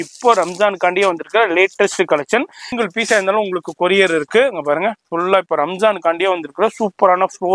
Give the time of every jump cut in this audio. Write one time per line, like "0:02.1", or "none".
0:02.6